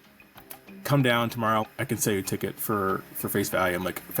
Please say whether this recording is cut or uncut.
cut